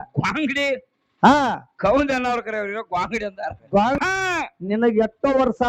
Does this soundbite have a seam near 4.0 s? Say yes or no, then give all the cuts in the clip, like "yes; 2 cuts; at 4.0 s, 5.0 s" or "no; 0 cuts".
yes; 1 cut; at 4.0 s